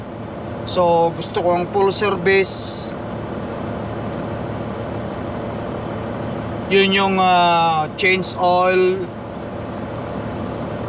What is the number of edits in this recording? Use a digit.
0